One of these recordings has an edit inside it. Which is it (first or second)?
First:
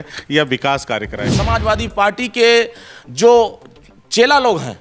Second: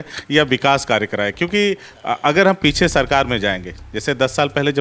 first